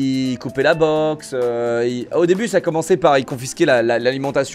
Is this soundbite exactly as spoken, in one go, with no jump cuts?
yes; 0 cuts

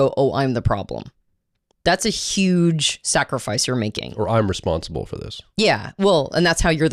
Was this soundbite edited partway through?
no; 0 cuts

